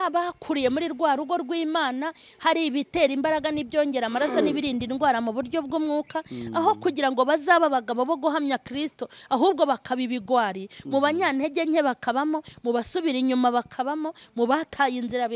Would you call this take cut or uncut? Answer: uncut